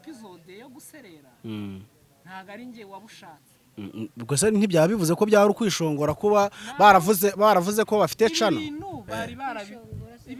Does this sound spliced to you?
no; 0 cuts

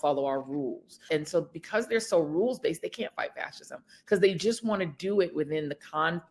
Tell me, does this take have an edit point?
yes; 1 cut; at 1.0 s

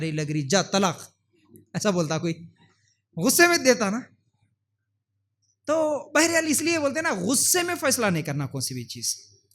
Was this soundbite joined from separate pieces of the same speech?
no; 0 cuts

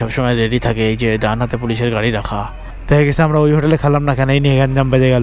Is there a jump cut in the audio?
no; 0 cuts

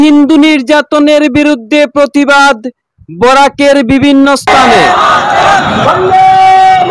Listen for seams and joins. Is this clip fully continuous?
yes; 0 cuts

